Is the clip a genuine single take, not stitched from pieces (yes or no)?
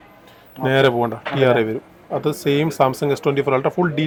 yes